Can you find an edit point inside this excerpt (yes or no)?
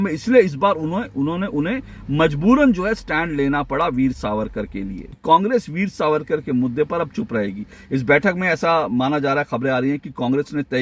yes